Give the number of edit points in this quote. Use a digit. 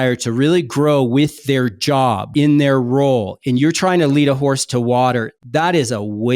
2